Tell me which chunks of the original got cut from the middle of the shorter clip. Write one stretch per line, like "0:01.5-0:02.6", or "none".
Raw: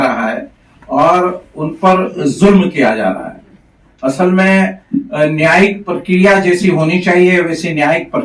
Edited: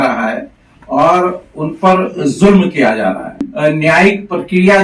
0:03.4-0:05.0